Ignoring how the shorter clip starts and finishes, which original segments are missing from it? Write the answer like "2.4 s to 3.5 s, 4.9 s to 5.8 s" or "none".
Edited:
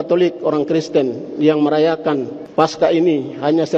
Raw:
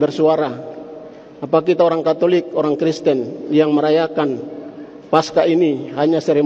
4.5 s to 4.9 s